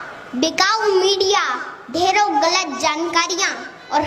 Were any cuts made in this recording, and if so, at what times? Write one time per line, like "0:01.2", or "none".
none